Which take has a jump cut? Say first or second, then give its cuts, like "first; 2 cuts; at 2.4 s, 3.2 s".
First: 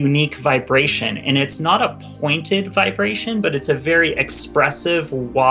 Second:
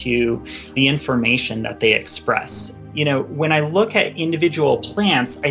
second; 2 cuts; at 0.7 s, 2.6 s